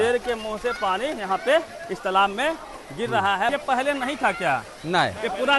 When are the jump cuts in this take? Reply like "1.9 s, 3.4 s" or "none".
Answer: 3.5 s

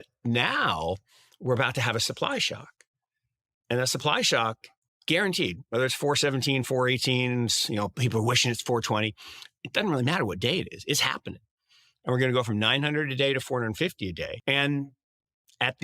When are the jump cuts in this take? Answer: 14.4 s

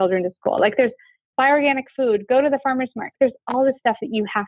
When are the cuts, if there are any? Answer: 1.3 s, 3.1 s

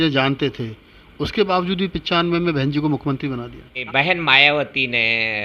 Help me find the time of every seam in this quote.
3.8 s

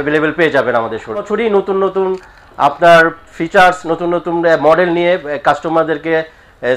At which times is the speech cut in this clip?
1.3 s

